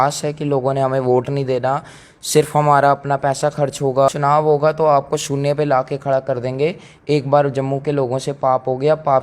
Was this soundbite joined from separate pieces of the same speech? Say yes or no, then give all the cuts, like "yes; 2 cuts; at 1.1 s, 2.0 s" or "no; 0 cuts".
yes; 1 cut; at 4.1 s